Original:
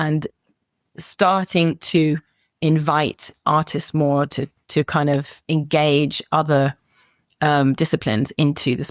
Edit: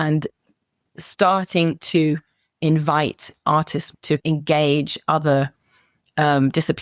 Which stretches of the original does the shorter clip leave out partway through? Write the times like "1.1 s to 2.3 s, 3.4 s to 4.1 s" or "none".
3.9 s to 5.2 s